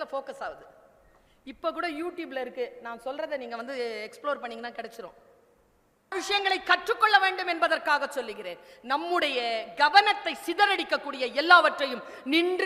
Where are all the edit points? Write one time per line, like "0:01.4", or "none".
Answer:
0:06.2